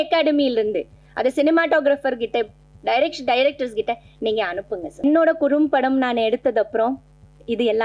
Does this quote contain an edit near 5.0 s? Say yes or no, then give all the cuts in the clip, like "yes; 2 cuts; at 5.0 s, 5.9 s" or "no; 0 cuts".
yes; 1 cut; at 5.0 s